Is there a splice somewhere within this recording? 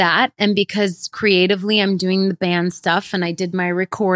no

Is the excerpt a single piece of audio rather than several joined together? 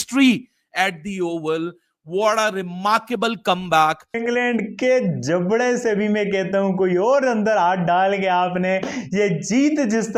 no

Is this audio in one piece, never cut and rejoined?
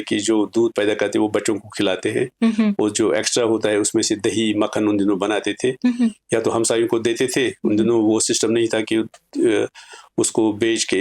yes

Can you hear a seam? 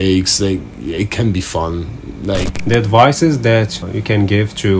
yes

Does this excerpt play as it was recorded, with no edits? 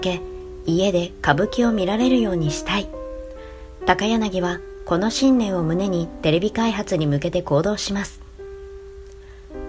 no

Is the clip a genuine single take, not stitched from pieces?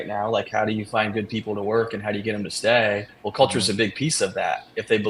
yes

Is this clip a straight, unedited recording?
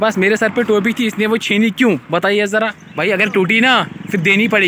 no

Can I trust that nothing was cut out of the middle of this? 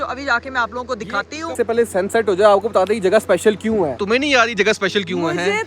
no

